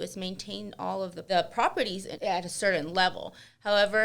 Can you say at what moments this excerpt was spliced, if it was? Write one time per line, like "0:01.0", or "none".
0:01.2
0:02.1